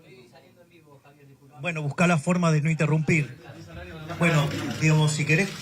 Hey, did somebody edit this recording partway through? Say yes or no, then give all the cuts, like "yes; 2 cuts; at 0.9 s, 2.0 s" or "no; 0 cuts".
no; 0 cuts